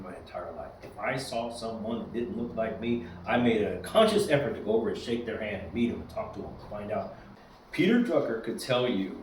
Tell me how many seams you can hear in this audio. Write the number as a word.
one